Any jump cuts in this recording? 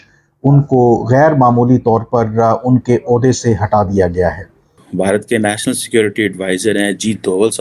yes; 1 cut; at 4.7 s

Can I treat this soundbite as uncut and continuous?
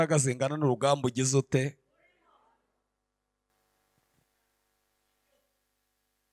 yes; 0 cuts

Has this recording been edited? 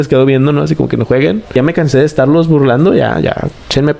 yes; 1 cut; at 1.6 s

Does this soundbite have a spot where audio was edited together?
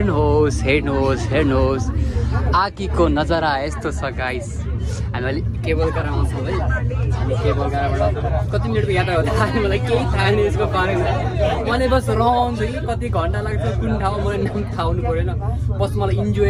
no; 0 cuts

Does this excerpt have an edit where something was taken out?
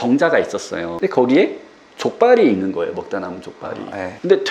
no; 0 cuts

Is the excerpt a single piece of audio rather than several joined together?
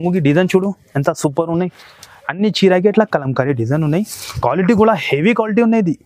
yes; 0 cuts

